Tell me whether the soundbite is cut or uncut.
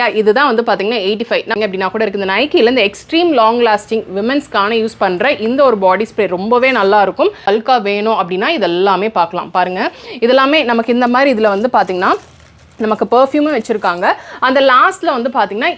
cut